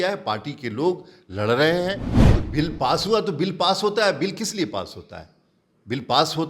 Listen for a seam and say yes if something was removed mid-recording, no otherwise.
yes